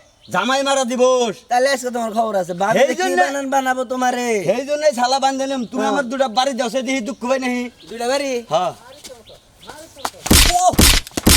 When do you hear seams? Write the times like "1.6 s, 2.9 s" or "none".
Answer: none